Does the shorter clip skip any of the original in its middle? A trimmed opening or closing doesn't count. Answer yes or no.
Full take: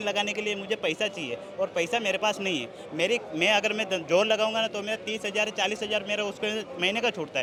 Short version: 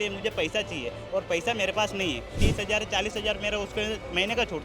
yes